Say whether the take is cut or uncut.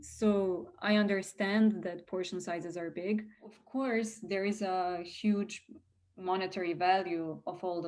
cut